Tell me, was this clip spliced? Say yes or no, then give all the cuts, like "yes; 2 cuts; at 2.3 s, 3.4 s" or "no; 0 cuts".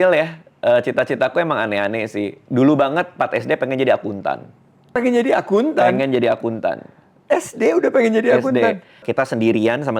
yes; 2 cuts; at 4.9 s, 9.0 s